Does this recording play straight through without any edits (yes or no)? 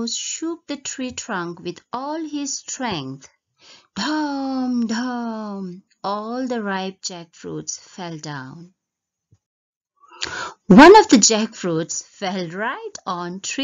no